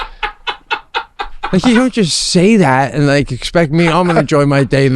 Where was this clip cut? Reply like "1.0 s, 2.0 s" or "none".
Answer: 1.5 s